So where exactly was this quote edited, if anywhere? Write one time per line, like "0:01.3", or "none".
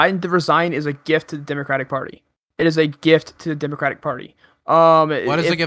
none